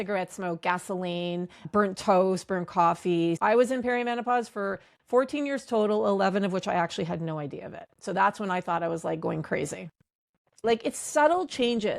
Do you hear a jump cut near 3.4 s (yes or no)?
yes